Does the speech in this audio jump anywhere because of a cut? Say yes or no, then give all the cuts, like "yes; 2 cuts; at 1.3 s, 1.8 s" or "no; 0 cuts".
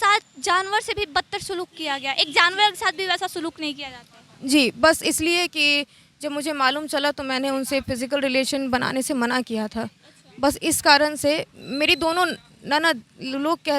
no; 0 cuts